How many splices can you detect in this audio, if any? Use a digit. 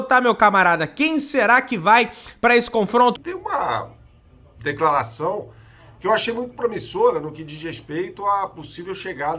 1